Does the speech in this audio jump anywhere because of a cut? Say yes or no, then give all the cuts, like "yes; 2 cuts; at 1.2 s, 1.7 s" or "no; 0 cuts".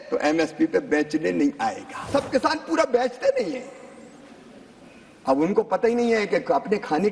yes; 1 cut; at 2.1 s